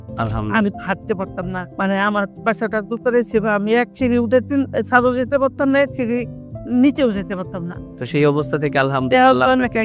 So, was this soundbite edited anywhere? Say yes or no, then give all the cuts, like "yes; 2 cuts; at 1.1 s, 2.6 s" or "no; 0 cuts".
yes; 1 cut; at 1.6 s